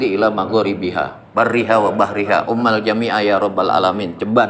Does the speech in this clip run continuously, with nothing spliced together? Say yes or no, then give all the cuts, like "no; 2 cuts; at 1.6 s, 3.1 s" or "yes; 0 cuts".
yes; 0 cuts